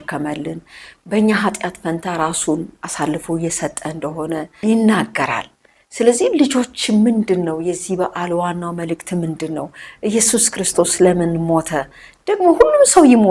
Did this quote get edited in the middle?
yes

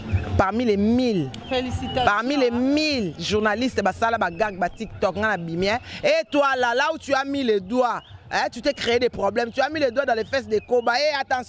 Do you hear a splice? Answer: no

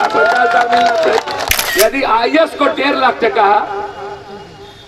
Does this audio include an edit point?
yes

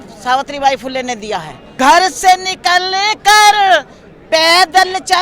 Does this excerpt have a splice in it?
yes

